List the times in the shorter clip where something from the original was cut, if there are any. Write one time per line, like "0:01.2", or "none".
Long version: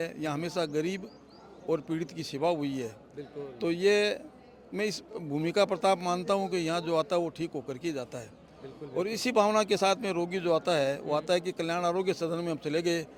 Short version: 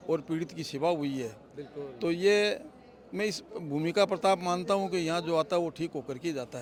none